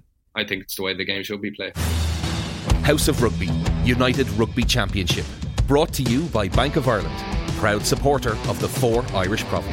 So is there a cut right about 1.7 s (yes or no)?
yes